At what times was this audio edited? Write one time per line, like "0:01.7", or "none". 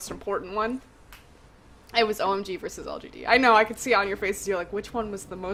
none